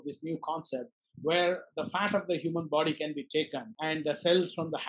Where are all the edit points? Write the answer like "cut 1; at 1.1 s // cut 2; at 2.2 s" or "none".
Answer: cut 1; at 3.7 s